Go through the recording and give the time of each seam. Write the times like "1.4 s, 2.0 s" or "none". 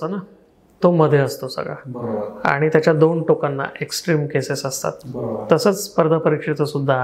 none